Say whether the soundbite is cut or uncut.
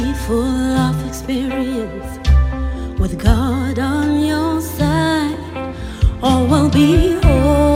uncut